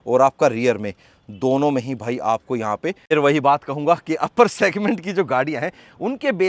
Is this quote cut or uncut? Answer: cut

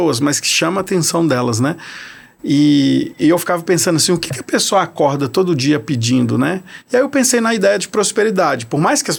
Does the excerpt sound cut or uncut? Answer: uncut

